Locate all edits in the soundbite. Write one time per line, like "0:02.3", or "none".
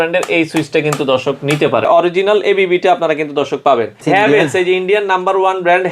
0:01.9
0:04.0